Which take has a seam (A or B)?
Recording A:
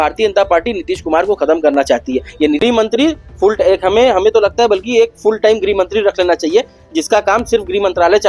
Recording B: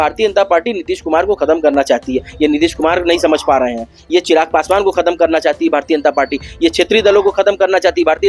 A